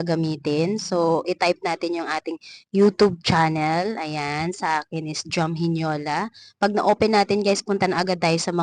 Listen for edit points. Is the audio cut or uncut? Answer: uncut